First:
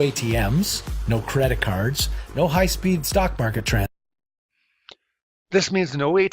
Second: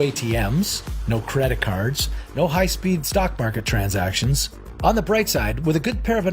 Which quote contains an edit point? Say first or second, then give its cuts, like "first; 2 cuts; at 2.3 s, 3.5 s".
second; 1 cut; at 3.9 s